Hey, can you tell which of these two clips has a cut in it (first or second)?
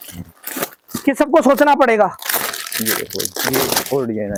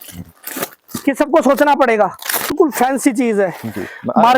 second